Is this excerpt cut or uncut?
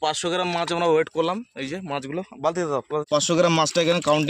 cut